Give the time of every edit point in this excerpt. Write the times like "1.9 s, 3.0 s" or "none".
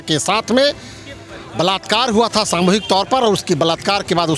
none